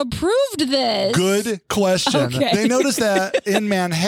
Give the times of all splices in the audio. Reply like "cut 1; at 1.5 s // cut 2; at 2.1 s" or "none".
cut 1; at 2.6 s

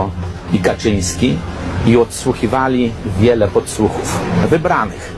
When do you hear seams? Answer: none

